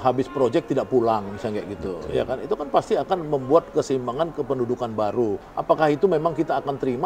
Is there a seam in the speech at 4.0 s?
no; 1 cut; at 5.5 s

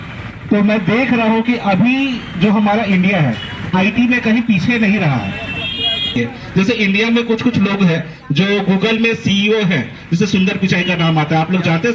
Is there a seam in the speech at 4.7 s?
no; 1 cut; at 6.2 s

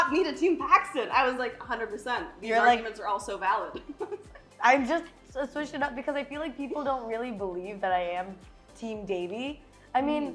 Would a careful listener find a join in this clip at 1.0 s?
no; 0 cuts

